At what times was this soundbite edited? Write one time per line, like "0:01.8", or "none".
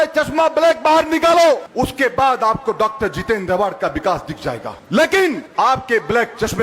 0:01.7
0:04.7
0:05.4